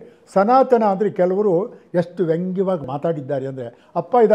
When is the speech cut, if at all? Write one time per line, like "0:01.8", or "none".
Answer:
0:02.9